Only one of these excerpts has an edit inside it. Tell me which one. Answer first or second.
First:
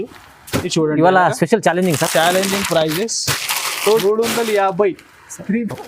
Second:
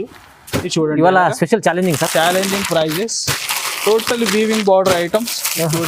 first